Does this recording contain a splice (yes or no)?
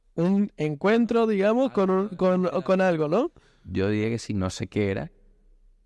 no